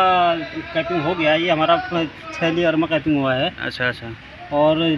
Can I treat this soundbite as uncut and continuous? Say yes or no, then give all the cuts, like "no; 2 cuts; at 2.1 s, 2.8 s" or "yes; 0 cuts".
yes; 0 cuts